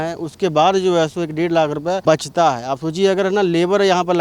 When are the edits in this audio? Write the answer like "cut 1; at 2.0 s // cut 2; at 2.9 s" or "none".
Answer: cut 1; at 2.0 s